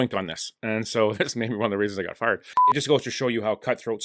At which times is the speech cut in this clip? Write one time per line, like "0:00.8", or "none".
0:02.6